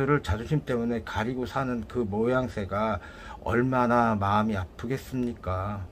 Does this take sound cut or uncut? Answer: uncut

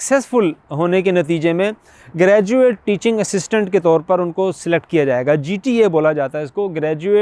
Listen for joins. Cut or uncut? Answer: uncut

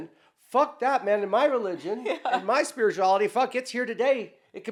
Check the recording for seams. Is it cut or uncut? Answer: uncut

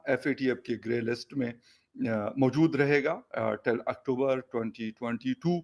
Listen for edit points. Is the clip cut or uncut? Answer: uncut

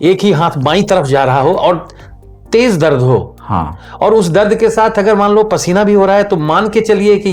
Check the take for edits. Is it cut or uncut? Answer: uncut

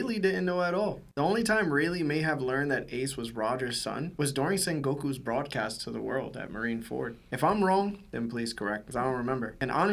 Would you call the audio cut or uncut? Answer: uncut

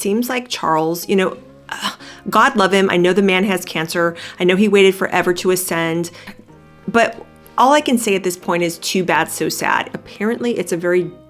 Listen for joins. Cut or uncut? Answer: cut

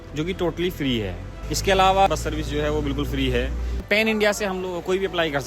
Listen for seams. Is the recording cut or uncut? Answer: cut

